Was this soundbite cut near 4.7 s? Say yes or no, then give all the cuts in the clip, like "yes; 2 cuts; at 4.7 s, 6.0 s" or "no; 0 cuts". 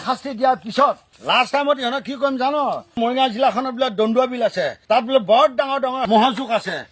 no; 2 cuts; at 1.1 s, 3.0 s